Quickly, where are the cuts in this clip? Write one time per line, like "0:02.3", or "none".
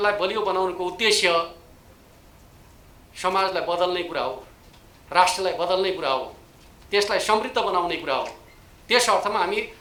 none